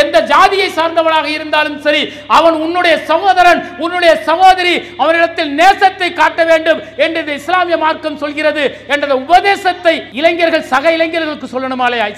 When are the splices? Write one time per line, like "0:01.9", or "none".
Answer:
0:10.1